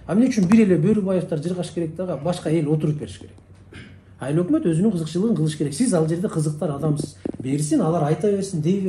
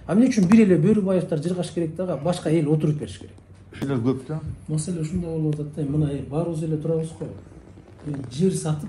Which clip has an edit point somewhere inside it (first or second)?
second